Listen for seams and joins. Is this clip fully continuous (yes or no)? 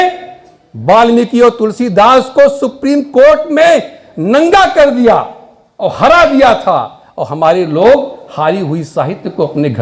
yes